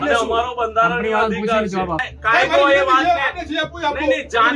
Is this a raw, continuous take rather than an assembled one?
no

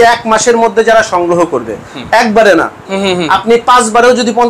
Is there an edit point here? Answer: no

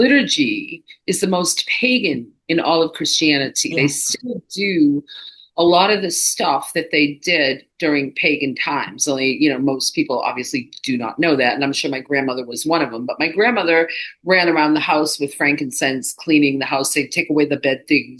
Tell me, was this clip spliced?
no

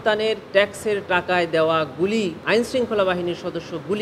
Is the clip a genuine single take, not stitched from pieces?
no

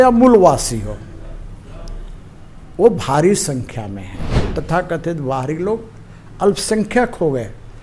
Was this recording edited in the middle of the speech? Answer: yes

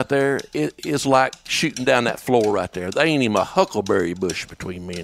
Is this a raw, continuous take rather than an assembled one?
no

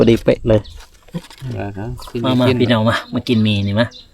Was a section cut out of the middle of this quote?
yes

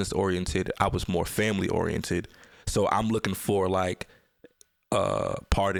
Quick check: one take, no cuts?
yes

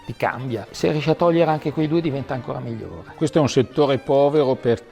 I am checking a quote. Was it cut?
yes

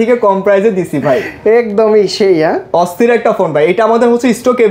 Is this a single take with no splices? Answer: yes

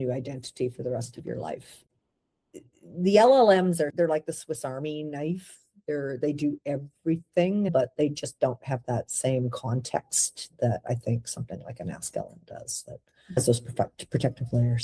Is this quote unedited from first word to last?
no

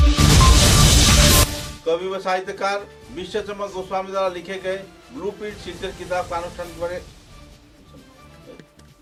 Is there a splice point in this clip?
no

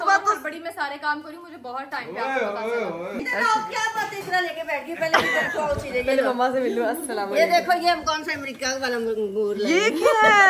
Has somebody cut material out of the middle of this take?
no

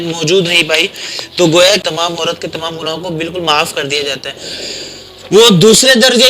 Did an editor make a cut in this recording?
yes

